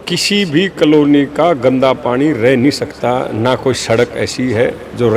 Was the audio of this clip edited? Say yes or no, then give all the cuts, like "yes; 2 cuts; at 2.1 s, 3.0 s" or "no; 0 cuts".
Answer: no; 0 cuts